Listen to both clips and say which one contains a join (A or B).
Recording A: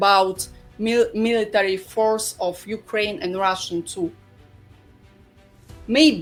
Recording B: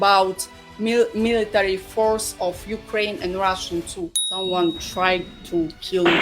B